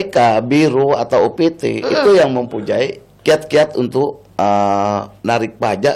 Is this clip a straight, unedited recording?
no; 2 cuts; at 3.0 s, 4.2 s

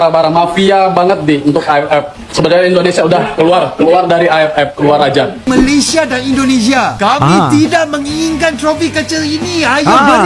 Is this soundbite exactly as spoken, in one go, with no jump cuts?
no; 1 cut; at 5.5 s

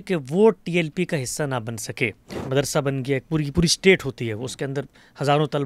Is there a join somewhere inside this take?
yes; 1 cut; at 2.3 s

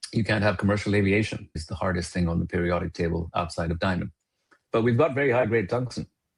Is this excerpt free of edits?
no; 2 cuts; at 1.6 s, 4.5 s

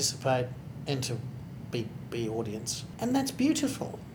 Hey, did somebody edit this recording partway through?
yes; 1 cut; at 2.8 s

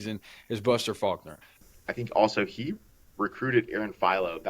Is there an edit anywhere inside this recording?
yes; 1 cut; at 1.6 s

